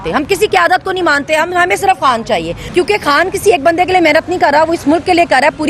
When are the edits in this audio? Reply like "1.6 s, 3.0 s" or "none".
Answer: 2.6 s